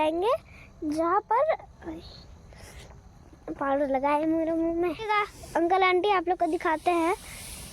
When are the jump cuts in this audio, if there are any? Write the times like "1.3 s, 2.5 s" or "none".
5.0 s